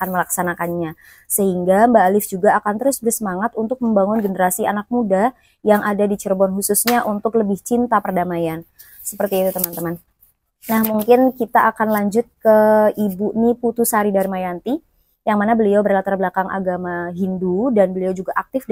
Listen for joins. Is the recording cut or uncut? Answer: uncut